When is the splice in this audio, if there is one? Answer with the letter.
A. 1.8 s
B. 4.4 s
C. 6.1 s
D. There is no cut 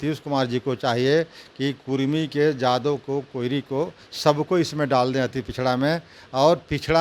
D